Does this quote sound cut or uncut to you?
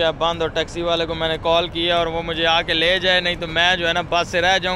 uncut